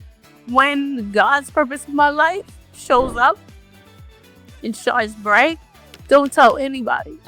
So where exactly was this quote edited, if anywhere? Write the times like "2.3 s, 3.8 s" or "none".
none

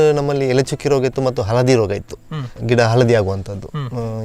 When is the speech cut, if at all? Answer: 2.5 s

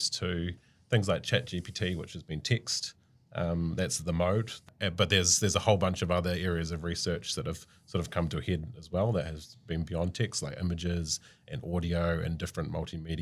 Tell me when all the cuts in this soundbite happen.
4.7 s

